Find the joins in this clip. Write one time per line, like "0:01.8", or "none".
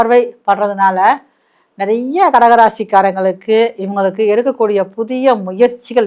none